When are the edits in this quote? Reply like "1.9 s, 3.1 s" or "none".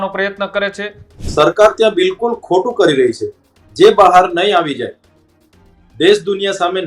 1.2 s